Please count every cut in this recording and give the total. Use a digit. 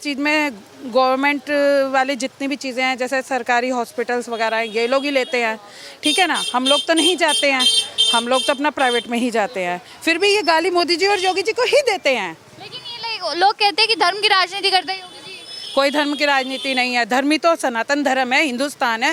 0